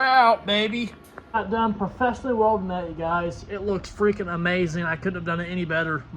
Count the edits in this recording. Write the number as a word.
one